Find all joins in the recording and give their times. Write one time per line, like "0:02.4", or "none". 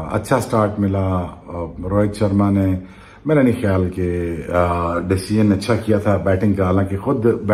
none